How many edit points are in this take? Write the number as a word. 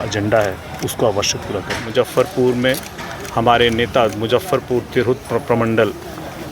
one